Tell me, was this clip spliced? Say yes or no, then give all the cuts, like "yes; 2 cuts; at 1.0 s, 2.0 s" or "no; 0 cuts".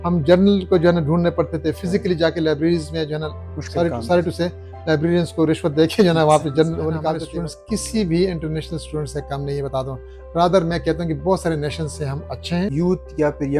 yes; 2 cuts; at 7.2 s, 12.7 s